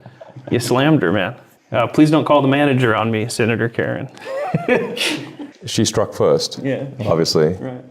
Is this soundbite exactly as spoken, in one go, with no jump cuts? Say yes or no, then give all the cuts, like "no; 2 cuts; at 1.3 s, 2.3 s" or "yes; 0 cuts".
yes; 0 cuts